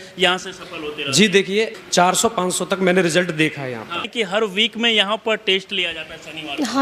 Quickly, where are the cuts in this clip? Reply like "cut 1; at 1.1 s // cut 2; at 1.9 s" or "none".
cut 1; at 1.8 s // cut 2; at 4.1 s